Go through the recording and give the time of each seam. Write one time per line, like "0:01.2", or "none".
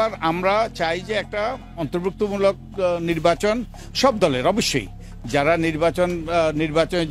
none